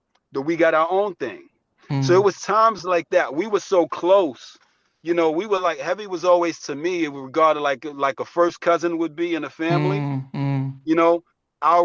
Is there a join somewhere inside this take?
no; 0 cuts

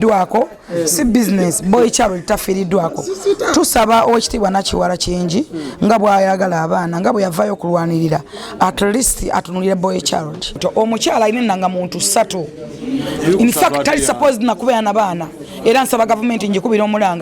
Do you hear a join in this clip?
yes; 1 cut; at 10.6 s

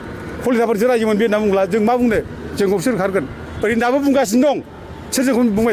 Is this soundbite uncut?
yes; 0 cuts

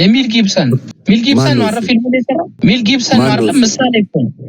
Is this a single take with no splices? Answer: no; 2 cuts; at 0.9 s, 2.5 s

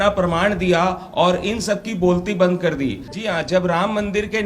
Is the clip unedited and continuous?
no; 1 cut; at 3.1 s

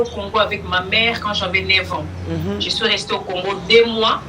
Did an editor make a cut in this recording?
no; 0 cuts

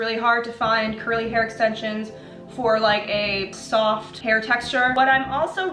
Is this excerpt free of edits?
no; 2 cuts; at 3.6 s, 4.9 s

